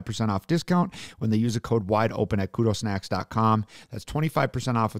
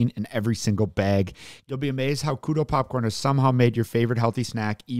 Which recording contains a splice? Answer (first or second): second